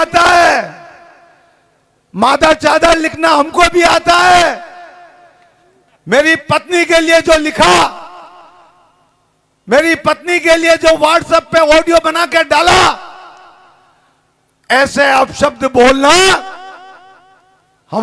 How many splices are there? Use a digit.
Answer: 0